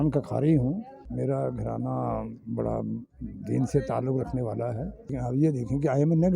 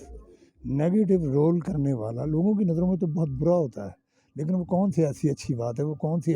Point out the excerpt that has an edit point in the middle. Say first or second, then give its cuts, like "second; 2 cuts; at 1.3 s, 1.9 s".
first; 2 cuts; at 1.0 s, 5.2 s